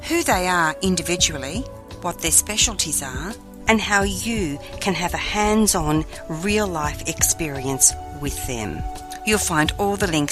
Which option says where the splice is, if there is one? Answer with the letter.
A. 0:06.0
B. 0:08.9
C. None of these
B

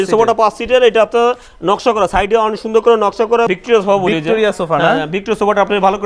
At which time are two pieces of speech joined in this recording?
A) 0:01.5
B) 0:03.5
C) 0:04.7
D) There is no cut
B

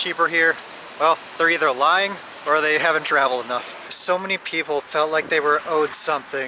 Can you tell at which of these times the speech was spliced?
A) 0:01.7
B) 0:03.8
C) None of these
B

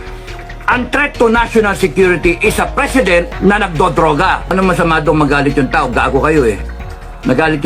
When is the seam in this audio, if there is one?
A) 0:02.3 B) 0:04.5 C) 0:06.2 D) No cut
B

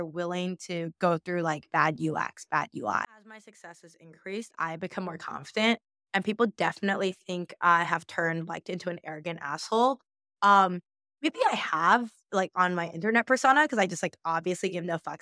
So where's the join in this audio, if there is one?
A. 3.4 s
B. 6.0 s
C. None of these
A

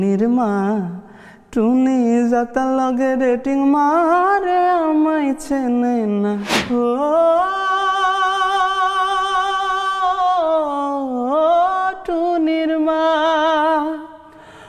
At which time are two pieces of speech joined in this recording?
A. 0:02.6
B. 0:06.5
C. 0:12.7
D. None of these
B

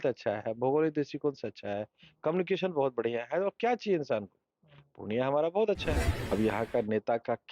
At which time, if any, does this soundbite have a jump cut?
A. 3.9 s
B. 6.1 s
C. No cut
B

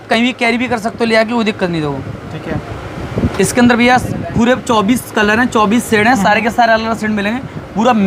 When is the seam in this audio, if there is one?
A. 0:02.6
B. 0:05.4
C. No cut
C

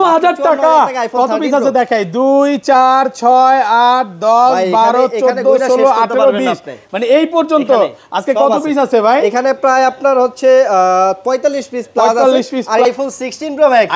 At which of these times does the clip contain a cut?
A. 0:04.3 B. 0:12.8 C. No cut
B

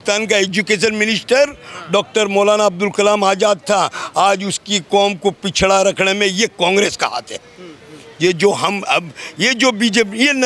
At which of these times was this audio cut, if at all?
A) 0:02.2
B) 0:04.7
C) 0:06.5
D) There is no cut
D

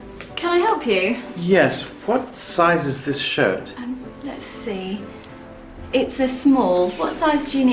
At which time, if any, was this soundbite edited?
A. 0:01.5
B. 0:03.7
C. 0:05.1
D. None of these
B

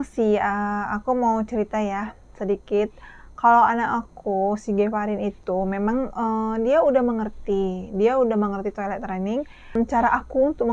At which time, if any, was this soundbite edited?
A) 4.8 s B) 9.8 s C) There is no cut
B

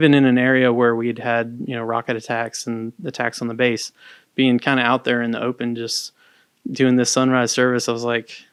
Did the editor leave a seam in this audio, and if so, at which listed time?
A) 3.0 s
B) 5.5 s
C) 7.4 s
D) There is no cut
D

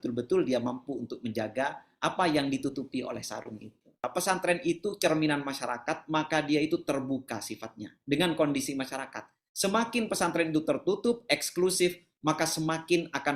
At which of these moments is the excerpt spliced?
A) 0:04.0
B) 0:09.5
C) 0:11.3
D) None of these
A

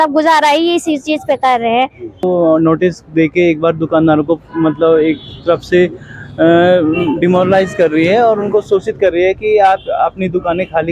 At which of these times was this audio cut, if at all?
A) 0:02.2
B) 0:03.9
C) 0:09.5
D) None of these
A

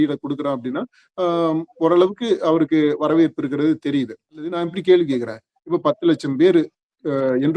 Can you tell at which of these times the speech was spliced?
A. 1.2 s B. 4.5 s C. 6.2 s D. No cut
B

